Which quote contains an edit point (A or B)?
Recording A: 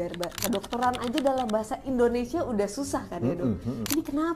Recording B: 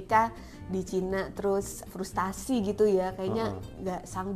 B